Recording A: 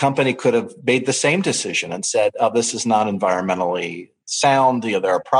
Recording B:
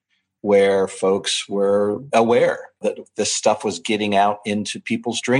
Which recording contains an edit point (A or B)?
B